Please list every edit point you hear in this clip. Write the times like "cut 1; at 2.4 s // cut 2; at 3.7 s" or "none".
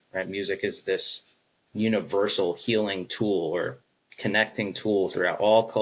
none